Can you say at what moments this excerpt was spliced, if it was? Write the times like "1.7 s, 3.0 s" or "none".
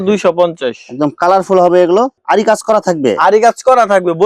2.2 s